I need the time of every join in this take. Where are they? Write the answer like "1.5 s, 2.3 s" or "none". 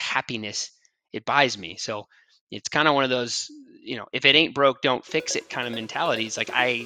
none